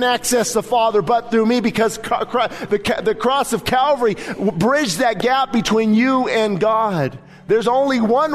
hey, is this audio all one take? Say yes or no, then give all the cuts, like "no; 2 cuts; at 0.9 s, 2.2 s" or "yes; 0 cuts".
yes; 0 cuts